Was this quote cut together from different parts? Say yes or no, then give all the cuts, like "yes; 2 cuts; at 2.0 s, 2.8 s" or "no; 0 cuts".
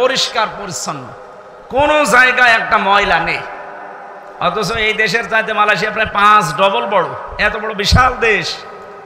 no; 0 cuts